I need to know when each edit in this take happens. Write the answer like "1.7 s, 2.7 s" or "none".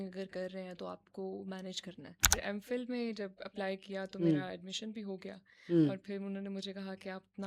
2.3 s